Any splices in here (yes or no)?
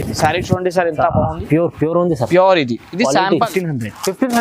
yes